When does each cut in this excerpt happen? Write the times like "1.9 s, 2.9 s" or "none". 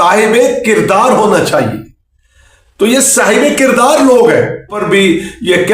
4.8 s